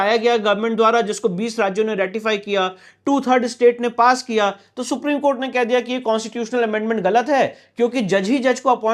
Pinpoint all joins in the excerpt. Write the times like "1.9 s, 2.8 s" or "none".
none